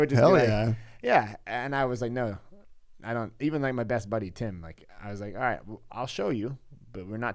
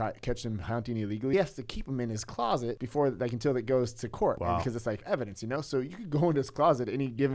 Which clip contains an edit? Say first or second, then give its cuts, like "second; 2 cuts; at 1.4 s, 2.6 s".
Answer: second; 3 cuts; at 1.3 s, 2.8 s, 4.7 s